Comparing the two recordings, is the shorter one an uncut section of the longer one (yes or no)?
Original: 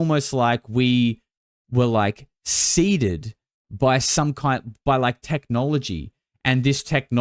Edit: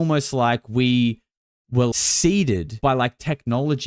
no